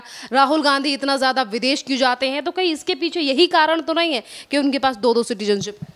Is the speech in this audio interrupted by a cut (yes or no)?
no